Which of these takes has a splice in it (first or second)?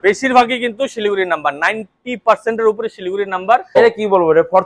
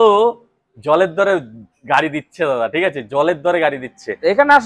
first